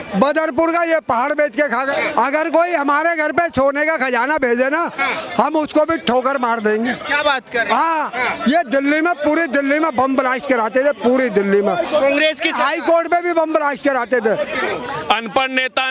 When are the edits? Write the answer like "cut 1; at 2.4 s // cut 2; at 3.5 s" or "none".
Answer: cut 1; at 1.8 s // cut 2; at 14.5 s